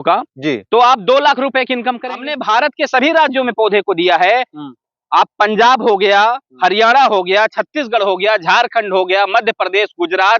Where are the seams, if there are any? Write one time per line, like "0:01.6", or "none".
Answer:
0:02.3